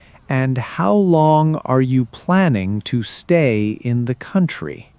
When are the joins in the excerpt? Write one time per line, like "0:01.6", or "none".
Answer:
none